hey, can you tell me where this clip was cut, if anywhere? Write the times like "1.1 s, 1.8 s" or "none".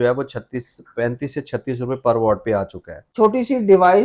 3.0 s

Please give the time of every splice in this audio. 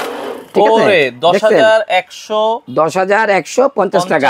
none

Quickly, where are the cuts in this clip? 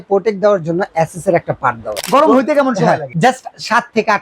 1.9 s, 3.1 s

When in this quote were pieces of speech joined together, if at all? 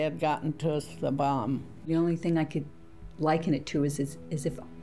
1.9 s

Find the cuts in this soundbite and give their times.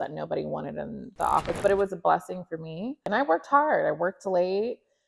3.1 s

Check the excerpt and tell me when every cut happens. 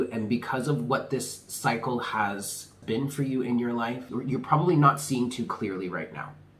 2.7 s, 4.1 s

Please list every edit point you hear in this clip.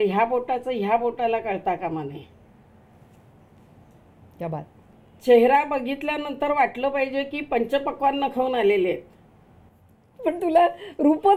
none

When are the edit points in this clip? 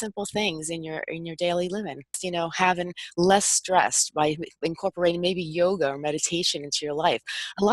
2.2 s

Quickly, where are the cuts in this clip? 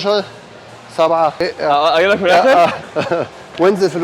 1.3 s, 2.9 s

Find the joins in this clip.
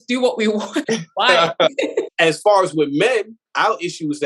0.8 s, 2.1 s

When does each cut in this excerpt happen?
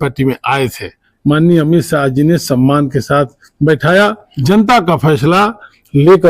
1.1 s, 4.3 s

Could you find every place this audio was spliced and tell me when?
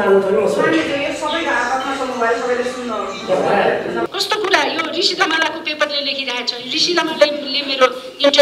4.1 s

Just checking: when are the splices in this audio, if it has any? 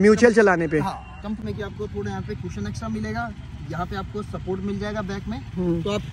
1.4 s

